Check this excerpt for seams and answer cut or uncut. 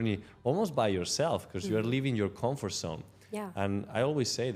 uncut